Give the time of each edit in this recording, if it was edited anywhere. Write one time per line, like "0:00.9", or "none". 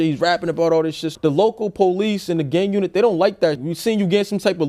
0:01.1
0:03.6